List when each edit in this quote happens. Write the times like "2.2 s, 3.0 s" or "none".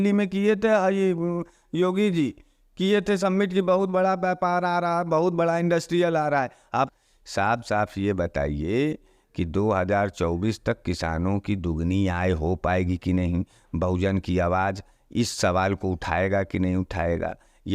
6.9 s